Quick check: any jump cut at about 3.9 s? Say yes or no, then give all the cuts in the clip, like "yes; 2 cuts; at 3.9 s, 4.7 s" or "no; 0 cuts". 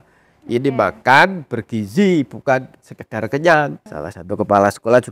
yes; 1 cut; at 3.9 s